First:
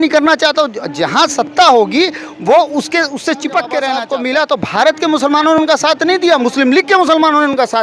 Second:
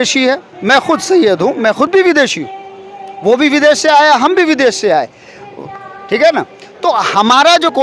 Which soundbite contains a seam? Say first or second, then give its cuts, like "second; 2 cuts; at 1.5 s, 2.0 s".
first; 1 cut; at 4.1 s